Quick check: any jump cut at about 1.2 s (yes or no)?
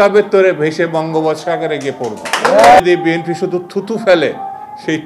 no